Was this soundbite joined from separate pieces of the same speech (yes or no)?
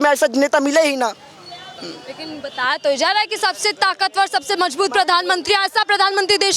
no